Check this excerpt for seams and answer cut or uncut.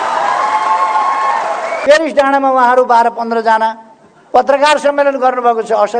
cut